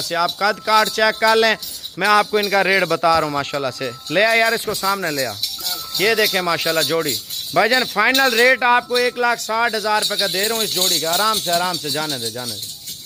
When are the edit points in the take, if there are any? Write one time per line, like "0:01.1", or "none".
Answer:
none